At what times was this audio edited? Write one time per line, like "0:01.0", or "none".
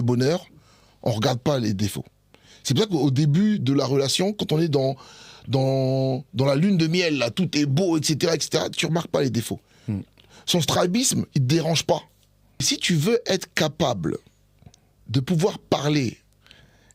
0:12.7